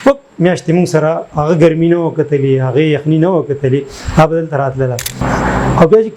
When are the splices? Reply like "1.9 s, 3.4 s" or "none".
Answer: 5.1 s